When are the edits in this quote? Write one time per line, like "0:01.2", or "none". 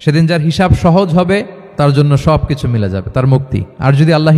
0:01.6